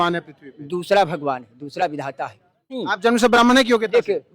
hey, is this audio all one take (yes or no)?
no